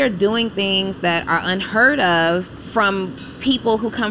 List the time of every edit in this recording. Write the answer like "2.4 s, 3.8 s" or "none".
2.6 s

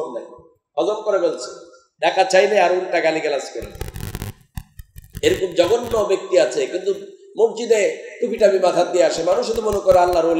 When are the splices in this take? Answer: none

